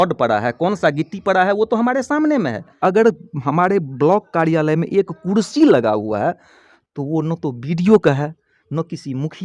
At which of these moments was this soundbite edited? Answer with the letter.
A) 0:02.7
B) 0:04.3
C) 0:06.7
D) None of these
A